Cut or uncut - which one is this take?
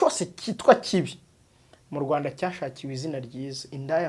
uncut